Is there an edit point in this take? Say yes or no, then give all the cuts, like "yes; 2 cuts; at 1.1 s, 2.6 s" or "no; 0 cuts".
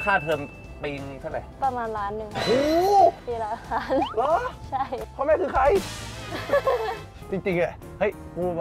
yes; 3 cuts; at 1.5 s, 5.0 s, 7.1 s